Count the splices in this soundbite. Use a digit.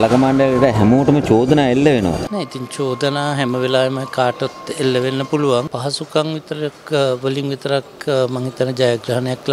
2